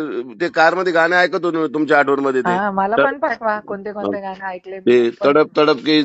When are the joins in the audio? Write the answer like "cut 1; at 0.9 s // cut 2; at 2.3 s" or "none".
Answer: cut 1; at 2.5 s